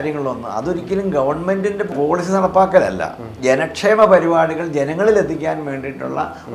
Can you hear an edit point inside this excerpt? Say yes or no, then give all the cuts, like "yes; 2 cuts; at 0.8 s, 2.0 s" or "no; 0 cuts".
yes; 2 cuts; at 1.9 s, 3.3 s